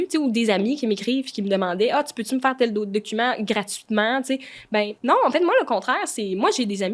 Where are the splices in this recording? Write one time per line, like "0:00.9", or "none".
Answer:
0:04.9